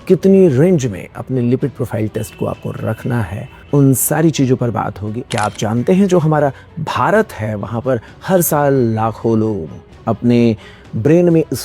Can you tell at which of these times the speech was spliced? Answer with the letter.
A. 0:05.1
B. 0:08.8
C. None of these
A